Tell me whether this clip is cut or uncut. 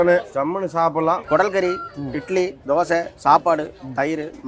cut